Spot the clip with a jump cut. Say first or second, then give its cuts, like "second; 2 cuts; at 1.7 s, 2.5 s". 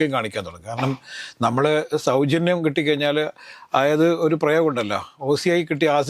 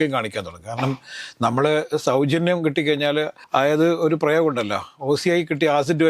second; 1 cut; at 3.4 s